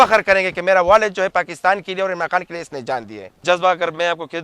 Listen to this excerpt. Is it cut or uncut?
cut